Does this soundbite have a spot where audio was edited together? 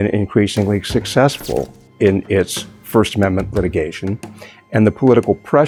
no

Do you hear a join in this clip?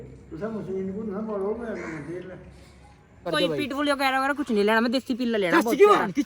yes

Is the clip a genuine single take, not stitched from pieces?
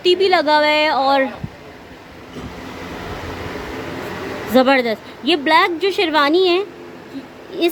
yes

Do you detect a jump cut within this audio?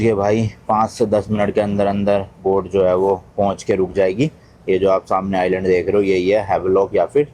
no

